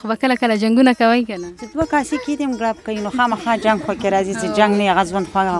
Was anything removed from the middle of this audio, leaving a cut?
no; 0 cuts

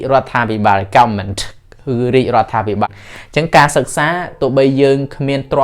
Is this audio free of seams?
no; 1 cut; at 2.9 s

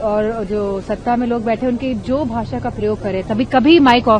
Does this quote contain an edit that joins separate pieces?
no; 0 cuts

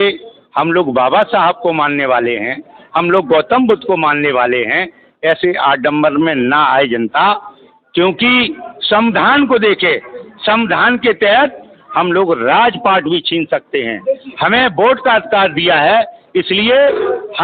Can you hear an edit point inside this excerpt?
no; 0 cuts

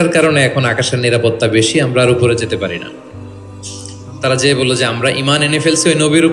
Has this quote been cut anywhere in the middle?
no; 0 cuts

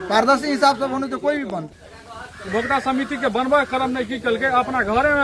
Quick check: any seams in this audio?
yes; 1 cut; at 1.7 s

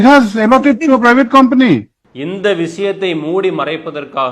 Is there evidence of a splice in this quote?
yes; 1 cut; at 2.0 s

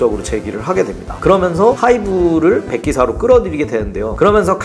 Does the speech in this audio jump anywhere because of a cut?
no; 0 cuts

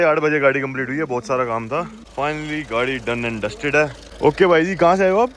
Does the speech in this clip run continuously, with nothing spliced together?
no; 2 cuts; at 2.0 s, 4.0 s

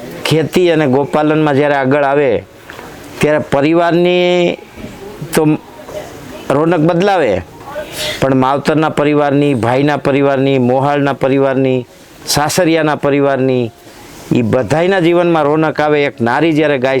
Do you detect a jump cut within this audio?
no; 0 cuts

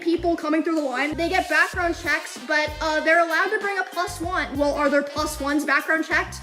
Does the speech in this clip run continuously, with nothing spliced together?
no; 2 cuts; at 1.1 s, 4.5 s

